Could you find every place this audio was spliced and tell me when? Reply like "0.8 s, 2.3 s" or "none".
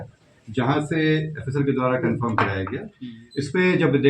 2.8 s